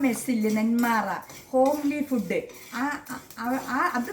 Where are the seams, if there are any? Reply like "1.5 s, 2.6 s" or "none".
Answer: none